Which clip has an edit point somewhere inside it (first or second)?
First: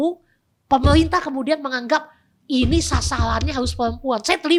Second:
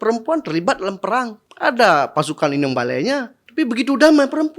second